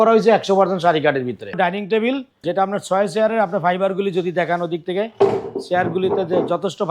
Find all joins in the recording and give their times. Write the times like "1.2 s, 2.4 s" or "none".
1.5 s, 2.3 s